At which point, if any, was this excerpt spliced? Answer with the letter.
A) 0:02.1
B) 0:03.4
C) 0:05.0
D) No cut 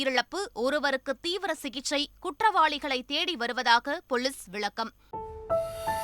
C